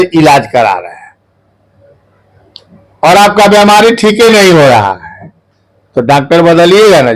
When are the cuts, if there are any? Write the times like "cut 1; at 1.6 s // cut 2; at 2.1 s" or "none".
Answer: none